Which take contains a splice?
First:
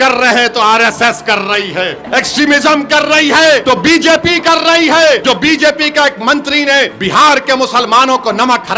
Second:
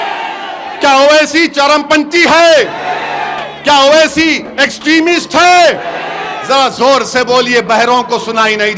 first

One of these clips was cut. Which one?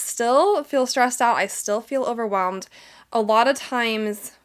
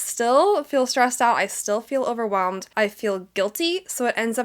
second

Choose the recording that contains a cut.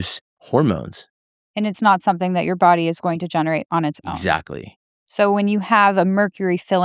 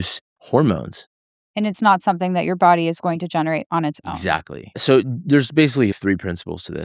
second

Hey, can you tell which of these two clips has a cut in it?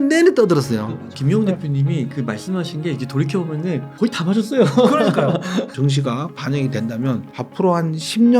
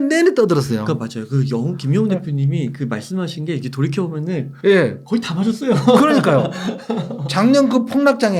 first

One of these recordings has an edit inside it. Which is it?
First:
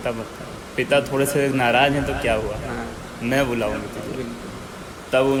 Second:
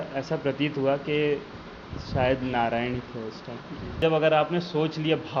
second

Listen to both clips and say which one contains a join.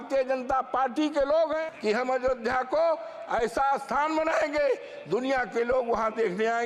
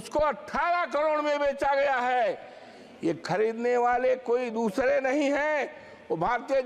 first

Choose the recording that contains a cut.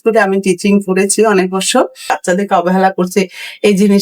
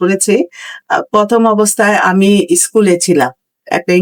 first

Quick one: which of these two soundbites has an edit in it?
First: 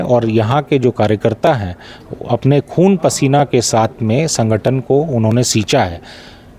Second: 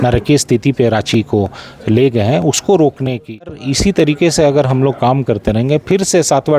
second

